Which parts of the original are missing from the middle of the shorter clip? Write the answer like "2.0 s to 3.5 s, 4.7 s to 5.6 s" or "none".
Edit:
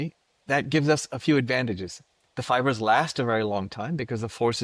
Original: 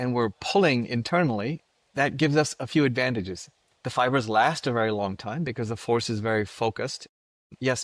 none